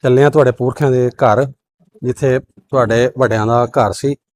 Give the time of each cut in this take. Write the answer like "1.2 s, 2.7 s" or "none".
none

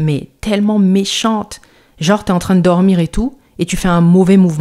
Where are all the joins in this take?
none

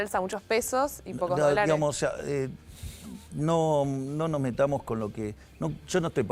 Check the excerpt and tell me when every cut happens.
none

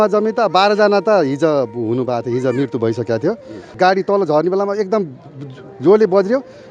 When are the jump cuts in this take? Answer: 3.6 s

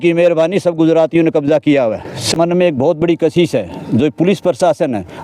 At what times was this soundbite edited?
2.3 s

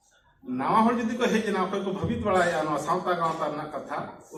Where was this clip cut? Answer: none

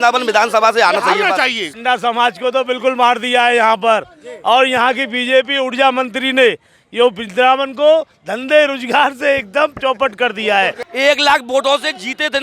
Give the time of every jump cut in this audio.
1.7 s, 10.8 s

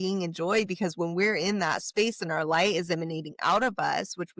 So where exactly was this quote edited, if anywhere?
none

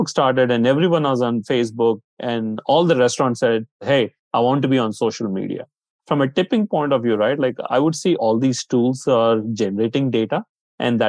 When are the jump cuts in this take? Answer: 2.1 s, 3.8 s, 5.9 s, 8.2 s

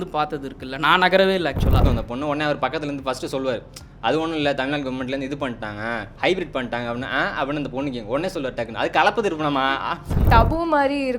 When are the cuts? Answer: 1.8 s, 10.2 s

